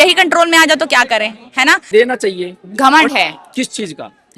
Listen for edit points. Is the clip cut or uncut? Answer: cut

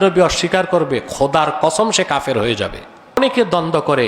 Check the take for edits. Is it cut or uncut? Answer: cut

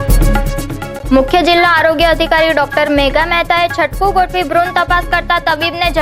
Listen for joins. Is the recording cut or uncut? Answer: cut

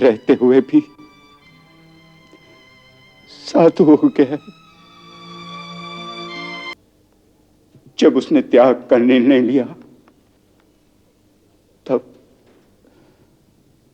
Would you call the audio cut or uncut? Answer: cut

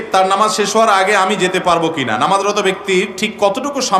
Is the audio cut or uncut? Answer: uncut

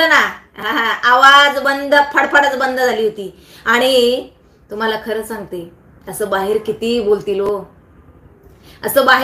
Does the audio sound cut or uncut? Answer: uncut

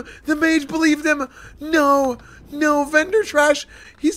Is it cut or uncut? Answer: uncut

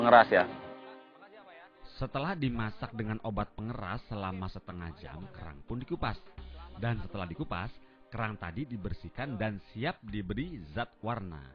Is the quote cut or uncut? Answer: uncut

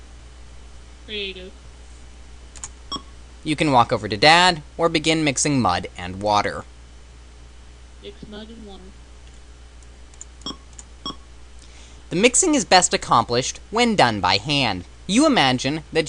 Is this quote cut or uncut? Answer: cut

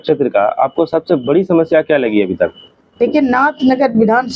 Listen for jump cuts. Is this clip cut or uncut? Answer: uncut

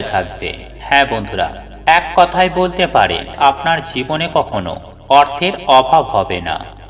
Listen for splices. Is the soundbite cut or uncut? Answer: cut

